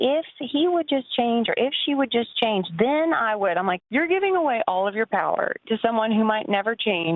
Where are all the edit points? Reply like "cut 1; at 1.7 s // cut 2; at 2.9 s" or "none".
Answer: cut 1; at 3.8 s